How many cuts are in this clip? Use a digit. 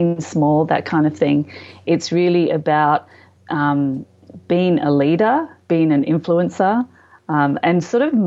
0